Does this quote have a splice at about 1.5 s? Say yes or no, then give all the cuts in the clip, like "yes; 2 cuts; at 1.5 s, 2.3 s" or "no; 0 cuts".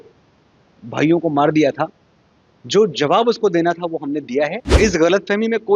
no; 1 cut; at 4.6 s